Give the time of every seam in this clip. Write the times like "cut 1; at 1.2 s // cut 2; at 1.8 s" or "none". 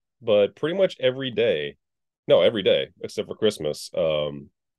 none